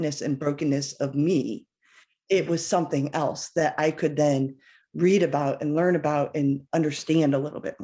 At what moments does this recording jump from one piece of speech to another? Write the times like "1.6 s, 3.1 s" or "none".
none